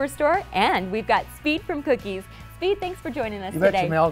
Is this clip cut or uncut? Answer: uncut